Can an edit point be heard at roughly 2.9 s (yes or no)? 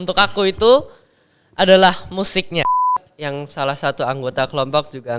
yes